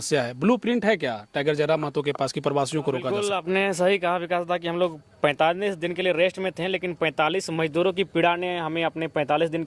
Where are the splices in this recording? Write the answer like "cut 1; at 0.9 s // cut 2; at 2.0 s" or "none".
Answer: cut 1; at 3.2 s